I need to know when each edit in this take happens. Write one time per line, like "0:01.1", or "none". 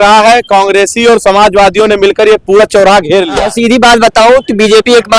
0:03.4